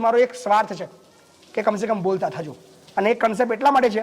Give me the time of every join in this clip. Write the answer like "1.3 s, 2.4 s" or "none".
none